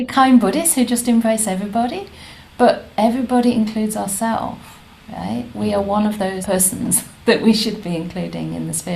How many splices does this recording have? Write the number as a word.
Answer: one